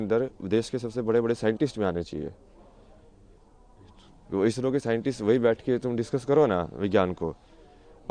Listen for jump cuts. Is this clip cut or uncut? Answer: uncut